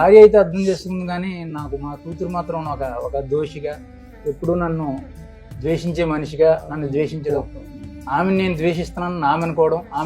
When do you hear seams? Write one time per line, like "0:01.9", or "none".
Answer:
none

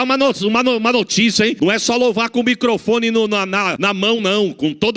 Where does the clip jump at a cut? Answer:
0:01.5
0:03.7

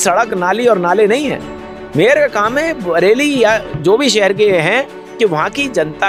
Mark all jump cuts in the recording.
none

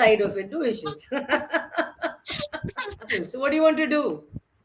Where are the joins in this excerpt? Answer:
0:03.2

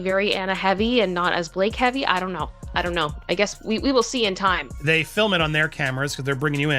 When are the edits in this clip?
0:04.7

